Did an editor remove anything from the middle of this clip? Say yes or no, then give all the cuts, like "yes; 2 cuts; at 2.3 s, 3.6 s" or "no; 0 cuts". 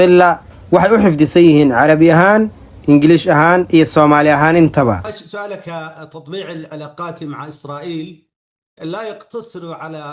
no; 0 cuts